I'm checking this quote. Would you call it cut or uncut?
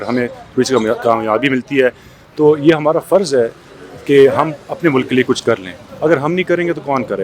uncut